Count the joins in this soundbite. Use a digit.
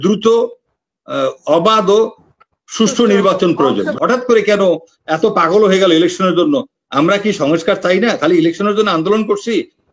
1